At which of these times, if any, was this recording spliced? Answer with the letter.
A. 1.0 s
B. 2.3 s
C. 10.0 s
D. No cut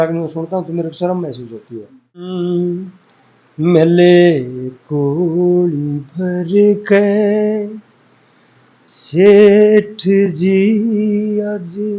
B